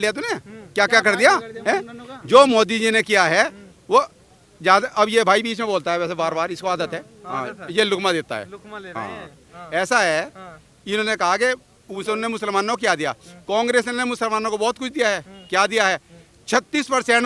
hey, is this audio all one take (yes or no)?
yes